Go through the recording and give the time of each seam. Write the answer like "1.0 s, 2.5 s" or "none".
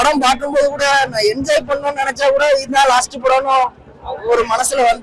none